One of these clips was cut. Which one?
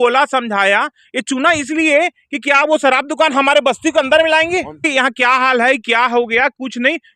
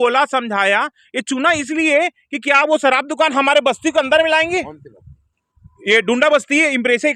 first; 1 cut; at 4.9 s

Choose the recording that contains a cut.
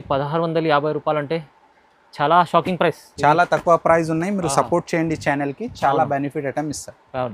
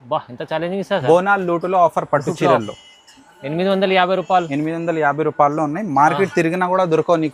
first; 1 cut; at 3.1 s

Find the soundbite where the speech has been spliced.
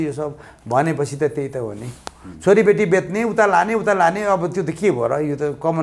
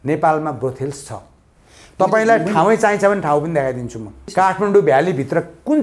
second; 1 cut; at 4.2 s

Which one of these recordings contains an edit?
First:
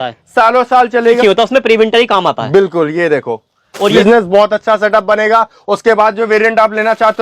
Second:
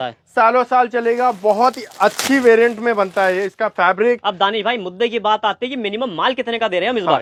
first; 2 cuts; at 1.2 s, 4.0 s

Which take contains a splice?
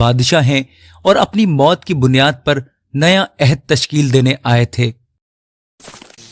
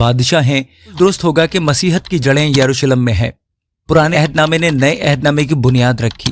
second; 2 cuts; at 0.9 s, 4.1 s

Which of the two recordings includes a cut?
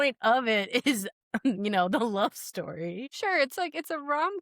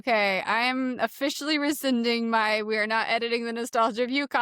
first; 1 cut; at 3.1 s

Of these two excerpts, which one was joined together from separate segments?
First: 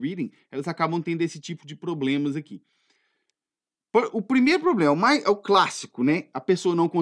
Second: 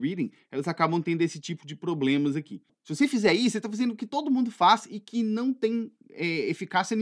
second; 1 cut; at 2.8 s

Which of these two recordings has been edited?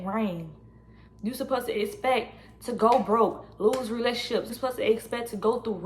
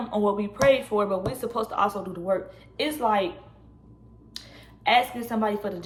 first; 1 cut; at 4.5 s

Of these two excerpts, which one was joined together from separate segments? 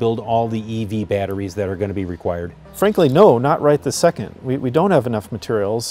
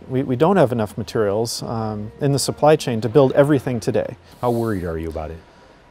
second; 1 cut; at 4.3 s

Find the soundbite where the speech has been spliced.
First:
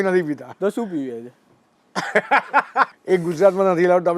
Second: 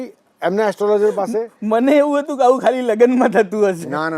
first; 1 cut; at 2.9 s

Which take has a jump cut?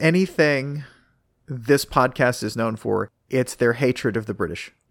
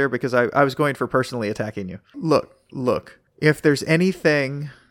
second; 1 cut; at 2.1 s

